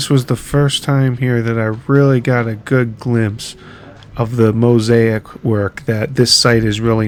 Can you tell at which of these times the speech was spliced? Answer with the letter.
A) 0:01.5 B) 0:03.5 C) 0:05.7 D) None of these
D